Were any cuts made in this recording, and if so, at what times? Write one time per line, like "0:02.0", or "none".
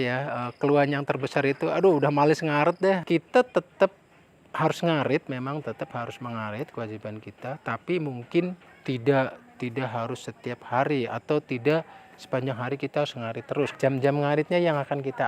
0:03.0
0:08.7
0:13.7